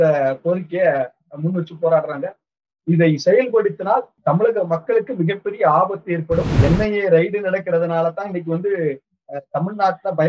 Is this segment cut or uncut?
cut